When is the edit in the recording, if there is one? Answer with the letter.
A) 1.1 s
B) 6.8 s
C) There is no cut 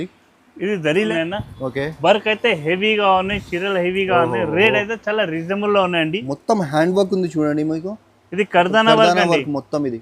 A